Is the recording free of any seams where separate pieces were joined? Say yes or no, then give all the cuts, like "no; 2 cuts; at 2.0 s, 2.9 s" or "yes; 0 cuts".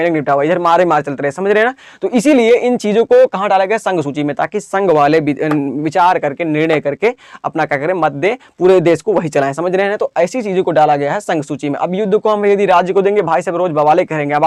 yes; 0 cuts